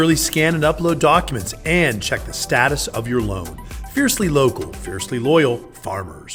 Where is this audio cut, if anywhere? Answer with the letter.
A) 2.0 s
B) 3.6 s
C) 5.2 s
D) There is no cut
D